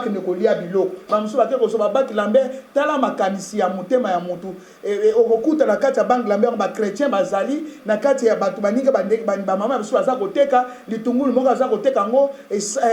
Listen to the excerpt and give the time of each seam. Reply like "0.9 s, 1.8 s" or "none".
1.0 s